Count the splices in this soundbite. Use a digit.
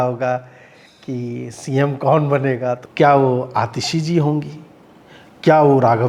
1